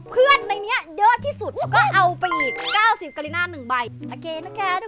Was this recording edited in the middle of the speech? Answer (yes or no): yes